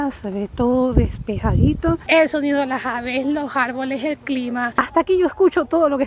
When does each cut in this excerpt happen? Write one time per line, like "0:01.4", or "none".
0:02.0
0:04.7